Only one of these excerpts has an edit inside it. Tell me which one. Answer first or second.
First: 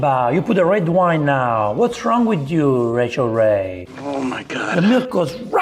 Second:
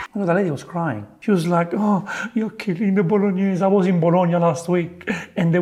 first